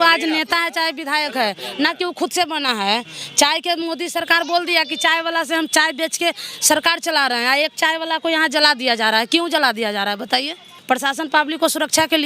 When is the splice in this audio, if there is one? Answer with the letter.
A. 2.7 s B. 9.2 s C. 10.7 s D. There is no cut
C